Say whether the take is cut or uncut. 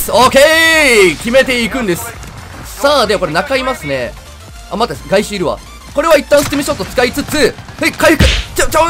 uncut